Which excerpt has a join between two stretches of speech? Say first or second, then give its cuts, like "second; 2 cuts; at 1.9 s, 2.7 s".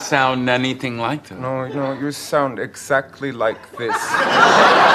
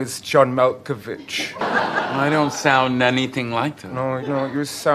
second; 1 cut; at 1.6 s